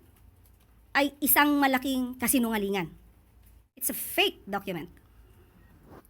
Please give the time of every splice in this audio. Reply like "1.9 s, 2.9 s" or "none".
3.8 s